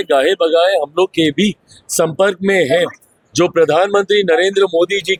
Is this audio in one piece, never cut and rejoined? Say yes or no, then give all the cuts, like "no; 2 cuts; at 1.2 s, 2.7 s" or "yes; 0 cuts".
yes; 0 cuts